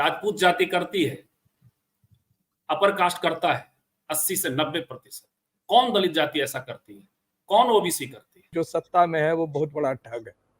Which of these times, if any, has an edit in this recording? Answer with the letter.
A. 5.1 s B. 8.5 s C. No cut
B